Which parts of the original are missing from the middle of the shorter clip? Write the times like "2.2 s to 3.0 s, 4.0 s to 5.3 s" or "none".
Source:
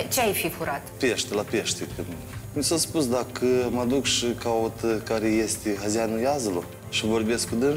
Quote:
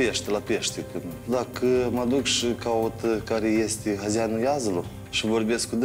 2.3 s to 3.1 s